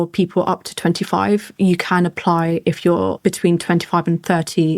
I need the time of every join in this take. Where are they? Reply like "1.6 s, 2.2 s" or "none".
3.1 s